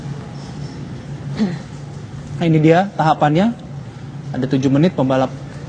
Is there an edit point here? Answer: no; 0 cuts

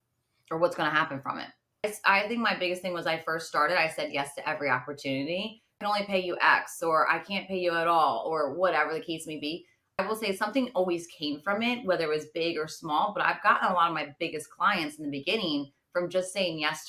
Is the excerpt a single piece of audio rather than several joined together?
no; 3 cuts; at 1.8 s, 5.8 s, 10.0 s

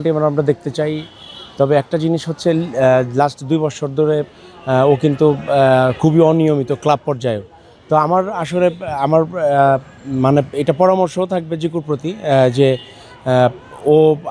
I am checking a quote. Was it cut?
no; 0 cuts

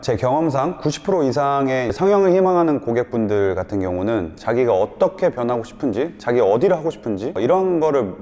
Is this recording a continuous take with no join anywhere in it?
yes; 0 cuts

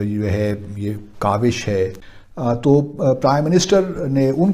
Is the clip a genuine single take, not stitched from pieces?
yes; 0 cuts

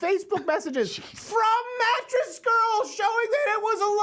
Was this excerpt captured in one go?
yes; 0 cuts

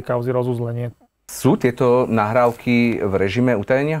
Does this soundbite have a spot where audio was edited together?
yes; 1 cut; at 1.3 s

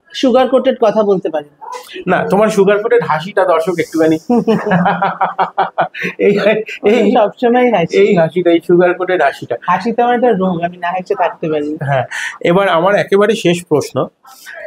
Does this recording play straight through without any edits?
yes; 0 cuts

